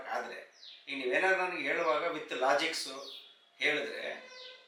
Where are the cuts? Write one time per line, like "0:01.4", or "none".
none